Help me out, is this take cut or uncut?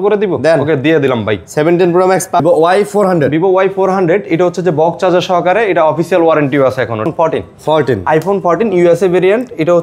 cut